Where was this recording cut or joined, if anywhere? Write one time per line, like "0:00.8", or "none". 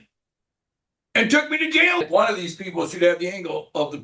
0:02.0